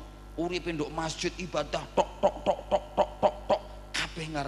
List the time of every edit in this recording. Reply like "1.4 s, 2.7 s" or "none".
none